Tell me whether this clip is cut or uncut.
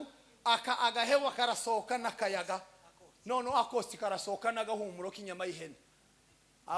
uncut